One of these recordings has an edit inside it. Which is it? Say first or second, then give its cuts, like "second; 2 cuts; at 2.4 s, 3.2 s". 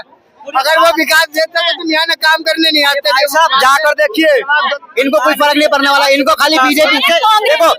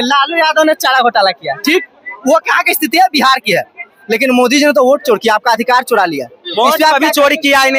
first; 1 cut; at 4.7 s